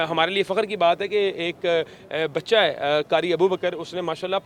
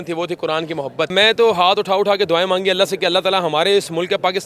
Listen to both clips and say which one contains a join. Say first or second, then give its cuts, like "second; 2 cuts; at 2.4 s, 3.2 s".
second; 1 cut; at 1.1 s